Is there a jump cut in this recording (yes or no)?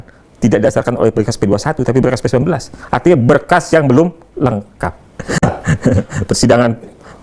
no